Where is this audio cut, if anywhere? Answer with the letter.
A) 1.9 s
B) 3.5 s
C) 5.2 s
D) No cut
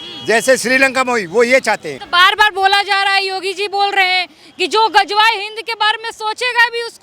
A